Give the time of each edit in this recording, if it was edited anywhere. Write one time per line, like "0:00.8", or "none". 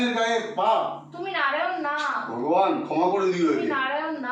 none